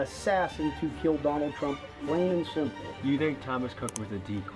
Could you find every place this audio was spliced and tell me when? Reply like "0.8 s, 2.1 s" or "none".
3.2 s